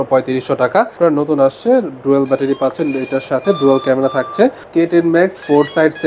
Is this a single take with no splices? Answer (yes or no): no